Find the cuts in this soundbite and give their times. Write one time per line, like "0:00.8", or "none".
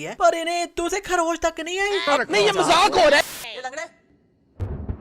0:02.1
0:03.2